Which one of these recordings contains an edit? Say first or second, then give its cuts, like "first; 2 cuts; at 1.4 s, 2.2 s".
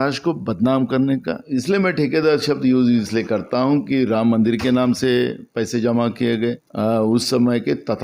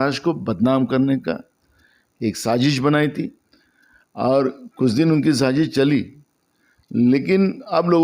first; 2 cuts; at 1.4 s, 6.7 s